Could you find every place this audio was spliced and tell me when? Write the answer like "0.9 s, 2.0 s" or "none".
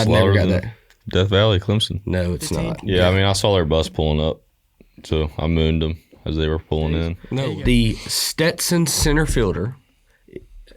2.7 s, 7.3 s